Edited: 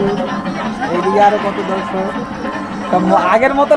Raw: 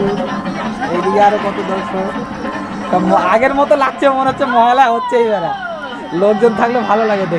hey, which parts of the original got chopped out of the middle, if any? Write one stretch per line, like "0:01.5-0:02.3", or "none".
none